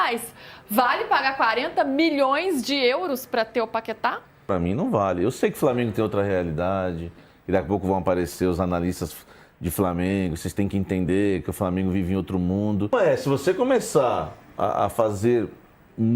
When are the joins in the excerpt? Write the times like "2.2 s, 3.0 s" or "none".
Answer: 4.5 s, 12.9 s

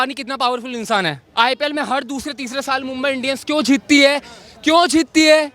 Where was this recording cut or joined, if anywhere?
1.2 s

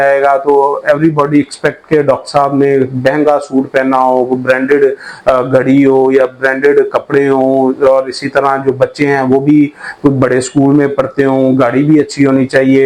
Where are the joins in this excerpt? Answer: none

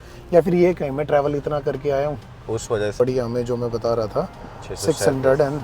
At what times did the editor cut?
3.0 s

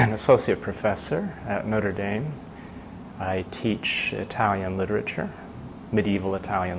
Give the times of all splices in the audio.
none

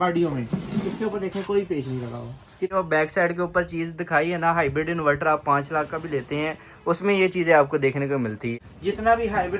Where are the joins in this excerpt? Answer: 2.7 s, 8.5 s

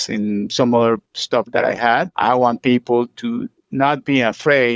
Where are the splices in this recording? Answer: 2.1 s

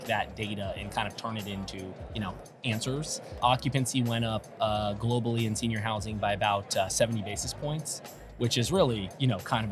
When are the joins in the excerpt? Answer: 3.4 s

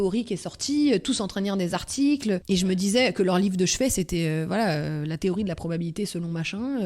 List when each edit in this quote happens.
2.4 s

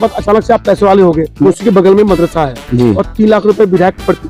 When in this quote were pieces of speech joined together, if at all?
1.4 s

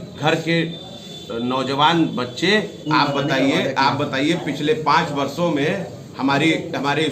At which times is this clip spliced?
2.8 s

